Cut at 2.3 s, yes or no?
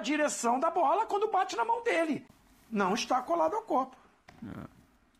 yes